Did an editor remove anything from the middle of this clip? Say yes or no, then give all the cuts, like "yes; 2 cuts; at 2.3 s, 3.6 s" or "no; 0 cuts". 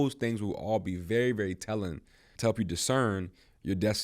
yes; 1 cut; at 2.3 s